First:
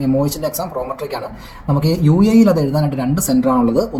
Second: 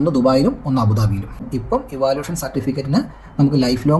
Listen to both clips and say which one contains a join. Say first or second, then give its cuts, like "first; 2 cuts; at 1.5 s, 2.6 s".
second; 1 cut; at 1.5 s